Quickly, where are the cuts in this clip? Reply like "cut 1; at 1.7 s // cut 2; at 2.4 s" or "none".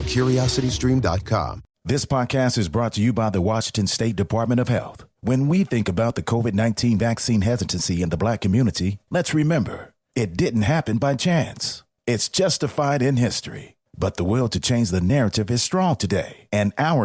cut 1; at 1.7 s